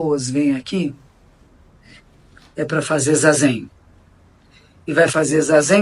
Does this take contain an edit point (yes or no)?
no